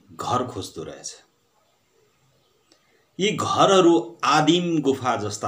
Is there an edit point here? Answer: no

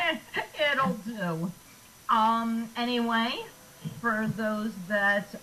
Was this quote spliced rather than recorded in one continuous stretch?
yes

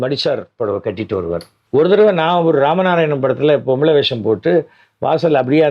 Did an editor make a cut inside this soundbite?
yes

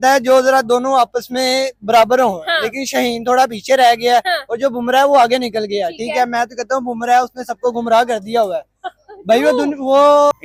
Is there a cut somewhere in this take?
no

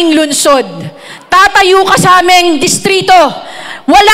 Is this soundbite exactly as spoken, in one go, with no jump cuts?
yes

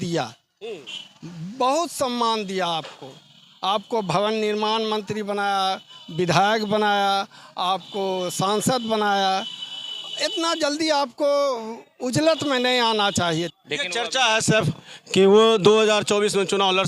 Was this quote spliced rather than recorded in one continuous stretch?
yes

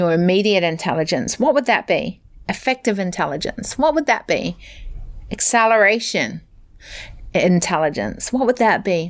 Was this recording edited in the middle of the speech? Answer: no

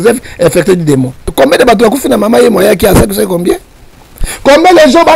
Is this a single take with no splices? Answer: no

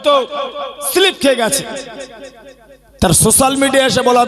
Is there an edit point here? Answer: no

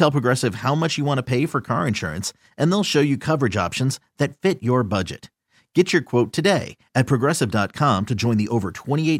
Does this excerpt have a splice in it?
no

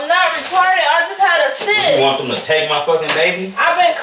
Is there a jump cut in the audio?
no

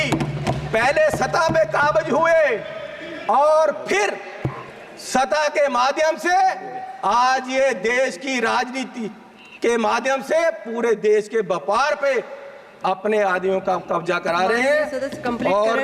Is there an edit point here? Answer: no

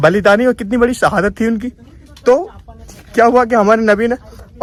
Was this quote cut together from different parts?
no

